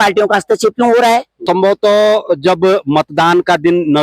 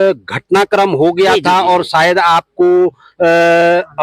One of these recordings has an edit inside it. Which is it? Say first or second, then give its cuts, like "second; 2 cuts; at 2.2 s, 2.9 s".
first; 1 cut; at 1.4 s